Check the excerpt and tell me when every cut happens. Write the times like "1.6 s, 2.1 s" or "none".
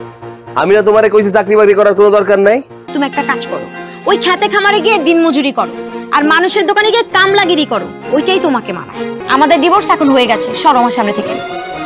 2.8 s, 9.1 s